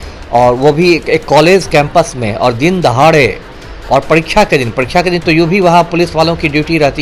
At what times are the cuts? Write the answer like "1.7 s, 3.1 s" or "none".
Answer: none